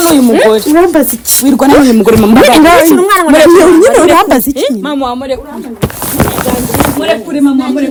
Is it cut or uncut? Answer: uncut